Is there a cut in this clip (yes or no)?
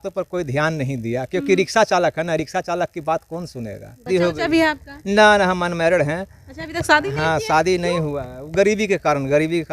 yes